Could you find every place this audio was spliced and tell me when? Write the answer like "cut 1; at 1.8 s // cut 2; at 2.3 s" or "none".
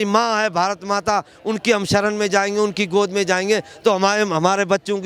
none

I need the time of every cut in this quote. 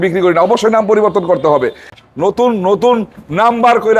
cut 1; at 1.9 s

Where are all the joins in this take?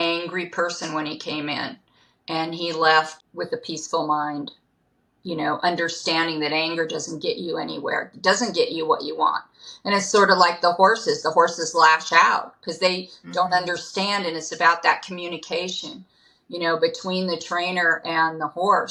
none

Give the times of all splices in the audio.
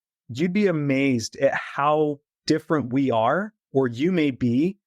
cut 1; at 2.3 s

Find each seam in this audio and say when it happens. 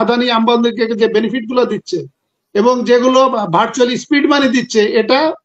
none

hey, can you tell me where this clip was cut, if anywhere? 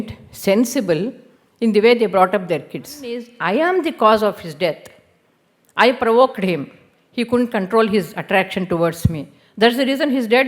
cut 1; at 3.3 s

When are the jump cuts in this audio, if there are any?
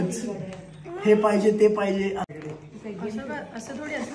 cut 1; at 2.3 s

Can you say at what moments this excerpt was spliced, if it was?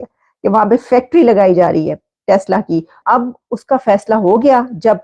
cut 1; at 3.0 s

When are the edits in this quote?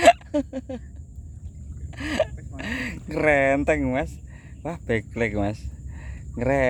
none

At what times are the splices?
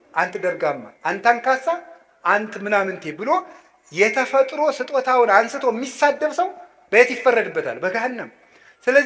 none

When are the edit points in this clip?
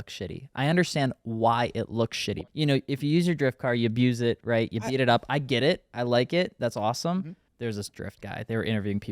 cut 1; at 2.3 s // cut 2; at 7.4 s

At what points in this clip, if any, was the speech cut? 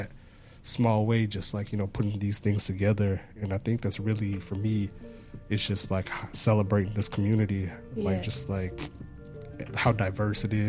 none

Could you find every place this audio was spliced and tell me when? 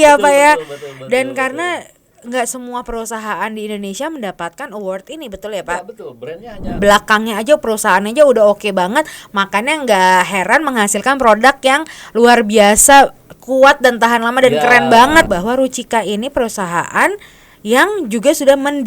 cut 1; at 6.8 s // cut 2; at 15.3 s

